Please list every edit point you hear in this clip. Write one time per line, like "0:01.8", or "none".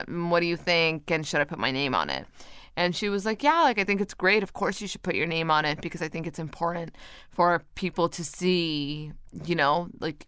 none